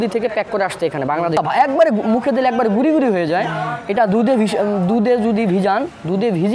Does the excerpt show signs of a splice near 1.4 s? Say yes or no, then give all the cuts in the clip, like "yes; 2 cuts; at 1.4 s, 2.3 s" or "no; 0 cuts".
yes; 1 cut; at 1.4 s